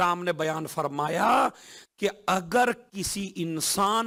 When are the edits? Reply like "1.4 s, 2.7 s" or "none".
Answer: none